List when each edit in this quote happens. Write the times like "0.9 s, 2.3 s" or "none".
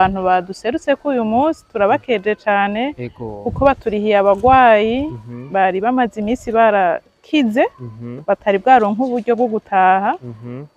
none